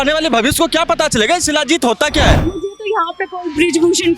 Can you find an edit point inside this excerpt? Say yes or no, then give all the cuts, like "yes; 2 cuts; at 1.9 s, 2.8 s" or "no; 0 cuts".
yes; 1 cut; at 2.6 s